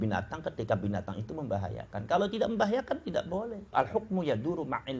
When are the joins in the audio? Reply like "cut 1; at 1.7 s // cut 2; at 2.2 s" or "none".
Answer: cut 1; at 3.7 s